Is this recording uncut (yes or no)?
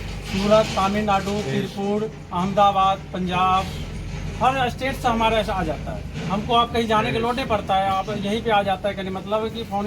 yes